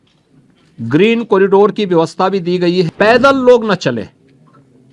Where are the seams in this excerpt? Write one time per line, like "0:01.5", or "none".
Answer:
0:02.9